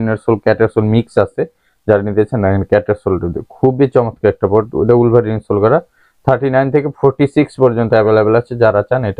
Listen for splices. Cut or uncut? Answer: uncut